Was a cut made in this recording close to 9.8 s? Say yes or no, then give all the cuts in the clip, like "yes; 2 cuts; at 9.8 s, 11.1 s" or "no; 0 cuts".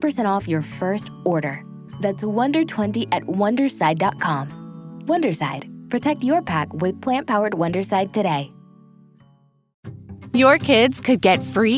yes; 1 cut; at 9.8 s